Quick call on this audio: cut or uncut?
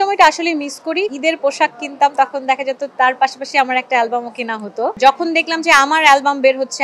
cut